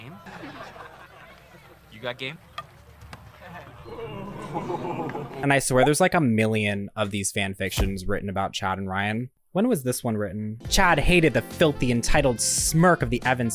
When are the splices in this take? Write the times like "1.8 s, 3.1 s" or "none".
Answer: 2.3 s, 5.4 s, 10.5 s